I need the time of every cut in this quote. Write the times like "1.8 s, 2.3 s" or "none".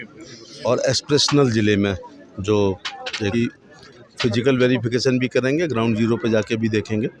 3.3 s